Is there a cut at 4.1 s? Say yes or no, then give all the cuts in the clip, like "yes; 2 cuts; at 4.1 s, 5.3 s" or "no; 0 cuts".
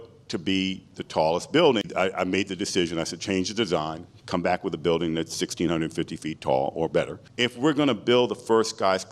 no; 2 cuts; at 1.9 s, 7.2 s